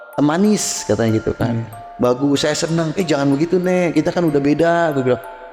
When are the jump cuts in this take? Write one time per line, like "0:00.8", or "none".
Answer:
none